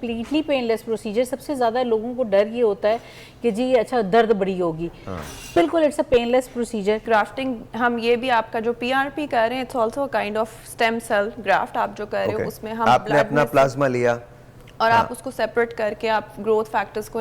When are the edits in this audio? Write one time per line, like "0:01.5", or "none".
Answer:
0:07.0